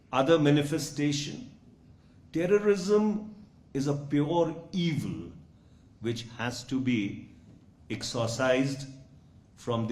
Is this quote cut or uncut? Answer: uncut